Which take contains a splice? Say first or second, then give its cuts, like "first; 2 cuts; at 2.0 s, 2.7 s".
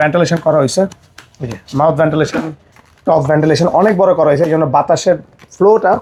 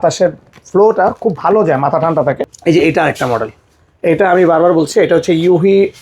second; 1 cut; at 2.5 s